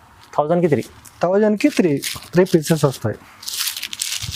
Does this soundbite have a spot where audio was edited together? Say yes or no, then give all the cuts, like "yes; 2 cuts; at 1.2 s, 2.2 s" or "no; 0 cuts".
no; 0 cuts